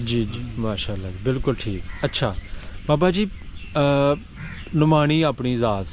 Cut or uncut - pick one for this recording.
uncut